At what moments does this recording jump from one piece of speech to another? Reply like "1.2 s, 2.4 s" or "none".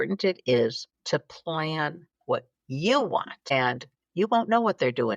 0.9 s, 2.1 s, 3.6 s